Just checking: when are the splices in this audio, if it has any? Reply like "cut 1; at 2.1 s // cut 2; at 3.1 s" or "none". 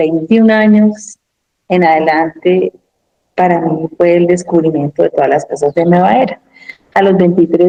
none